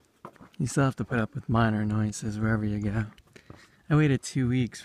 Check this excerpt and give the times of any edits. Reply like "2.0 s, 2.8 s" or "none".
3.8 s